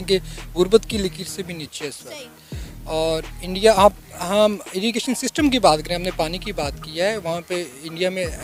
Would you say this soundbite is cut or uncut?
uncut